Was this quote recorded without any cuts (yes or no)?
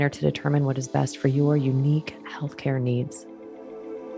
no